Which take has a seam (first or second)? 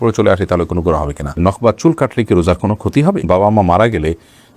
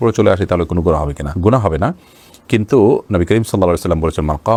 first